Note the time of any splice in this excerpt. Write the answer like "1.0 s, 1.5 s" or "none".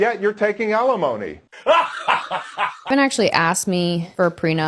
1.5 s, 2.9 s